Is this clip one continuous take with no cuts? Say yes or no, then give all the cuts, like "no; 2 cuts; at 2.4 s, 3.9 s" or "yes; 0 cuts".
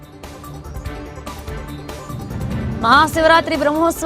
no; 1 cut; at 2.2 s